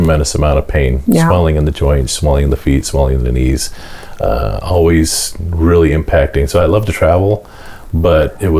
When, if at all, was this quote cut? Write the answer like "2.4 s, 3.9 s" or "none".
none